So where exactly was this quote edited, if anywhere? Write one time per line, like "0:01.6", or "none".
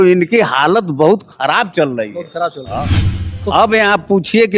0:03.0